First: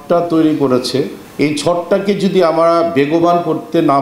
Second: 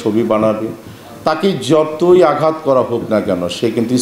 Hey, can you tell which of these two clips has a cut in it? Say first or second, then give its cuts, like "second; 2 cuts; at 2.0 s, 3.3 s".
first; 1 cut; at 1.2 s